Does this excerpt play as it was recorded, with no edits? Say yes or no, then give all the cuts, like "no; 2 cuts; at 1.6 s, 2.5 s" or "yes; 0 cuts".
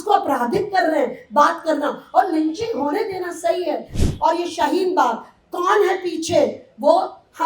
no; 1 cut; at 4.0 s